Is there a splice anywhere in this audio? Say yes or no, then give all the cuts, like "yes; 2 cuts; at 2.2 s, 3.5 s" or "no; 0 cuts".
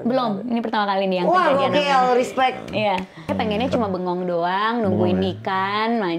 yes; 1 cut; at 3.3 s